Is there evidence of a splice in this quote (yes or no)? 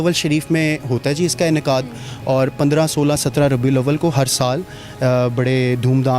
no